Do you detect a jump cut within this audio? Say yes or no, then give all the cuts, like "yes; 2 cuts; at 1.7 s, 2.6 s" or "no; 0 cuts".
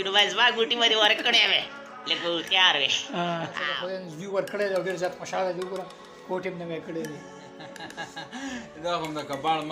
yes; 1 cut; at 3.7 s